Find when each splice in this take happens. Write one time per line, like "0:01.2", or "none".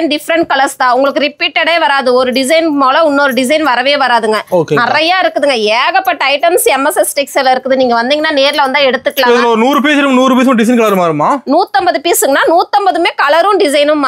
none

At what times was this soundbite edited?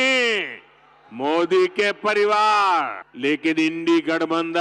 0:03.0

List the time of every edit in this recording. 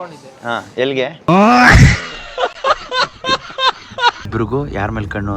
0:04.3

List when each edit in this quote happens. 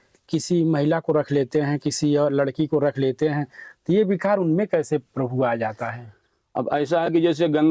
none

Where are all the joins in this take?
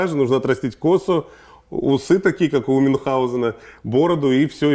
none

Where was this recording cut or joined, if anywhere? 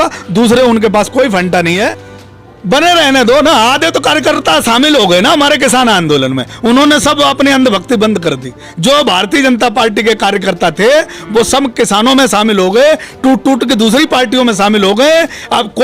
0:02.0

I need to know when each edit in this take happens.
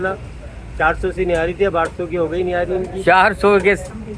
none

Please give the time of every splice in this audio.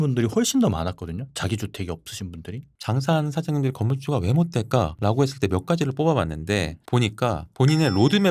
0:02.7

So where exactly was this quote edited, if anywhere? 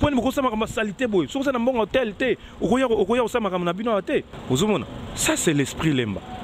0:04.3

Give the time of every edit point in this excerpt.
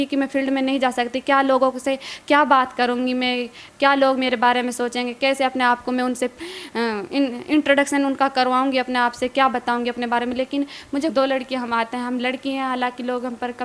0:11.1

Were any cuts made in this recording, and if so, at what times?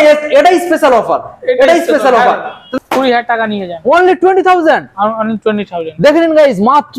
0:02.6

